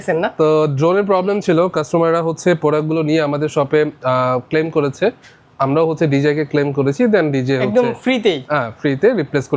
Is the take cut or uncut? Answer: uncut